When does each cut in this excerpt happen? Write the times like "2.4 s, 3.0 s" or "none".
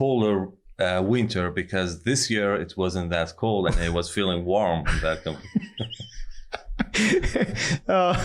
none